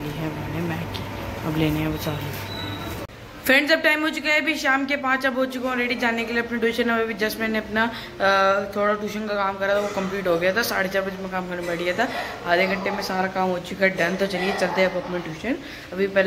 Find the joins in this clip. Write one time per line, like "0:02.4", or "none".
0:03.1